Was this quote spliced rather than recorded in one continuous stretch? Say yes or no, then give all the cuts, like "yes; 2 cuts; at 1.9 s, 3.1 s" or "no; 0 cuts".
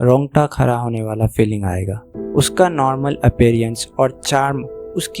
yes; 1 cut; at 2.1 s